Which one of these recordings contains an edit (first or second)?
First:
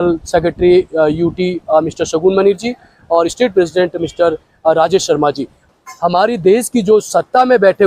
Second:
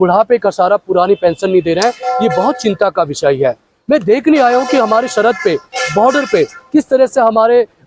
first